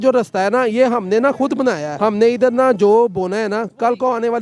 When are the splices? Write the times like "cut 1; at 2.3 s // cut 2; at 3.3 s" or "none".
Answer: cut 1; at 1.9 s